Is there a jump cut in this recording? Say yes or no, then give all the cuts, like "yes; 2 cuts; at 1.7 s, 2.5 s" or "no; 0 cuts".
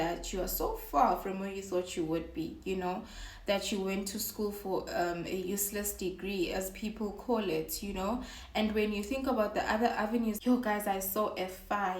yes; 1 cut; at 10.4 s